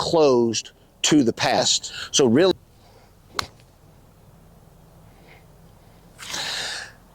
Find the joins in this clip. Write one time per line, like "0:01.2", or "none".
0:02.5